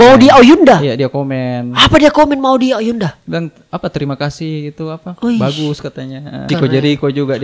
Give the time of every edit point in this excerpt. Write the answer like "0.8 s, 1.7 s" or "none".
6.5 s